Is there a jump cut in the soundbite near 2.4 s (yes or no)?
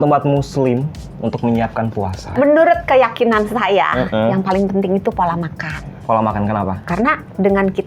yes